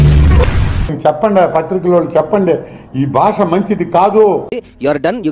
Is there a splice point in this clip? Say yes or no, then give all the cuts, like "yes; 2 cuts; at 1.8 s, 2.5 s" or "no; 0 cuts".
yes; 2 cuts; at 0.9 s, 4.5 s